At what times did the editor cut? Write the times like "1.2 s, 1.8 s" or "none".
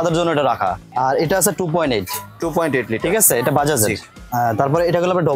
0.8 s, 4.1 s